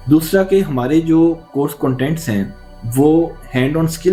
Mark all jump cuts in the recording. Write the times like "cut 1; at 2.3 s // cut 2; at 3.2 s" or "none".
none